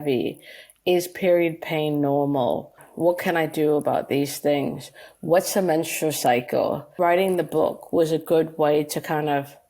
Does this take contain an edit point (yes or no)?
yes